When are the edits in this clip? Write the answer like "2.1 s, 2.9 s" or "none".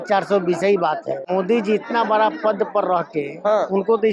1.2 s